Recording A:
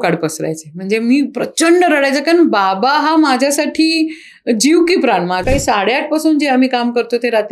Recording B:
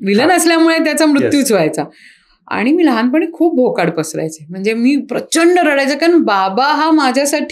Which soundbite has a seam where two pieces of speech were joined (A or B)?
A